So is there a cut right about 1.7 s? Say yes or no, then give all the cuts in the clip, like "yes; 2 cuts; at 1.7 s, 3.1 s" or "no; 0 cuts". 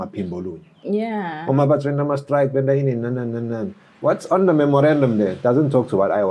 no; 0 cuts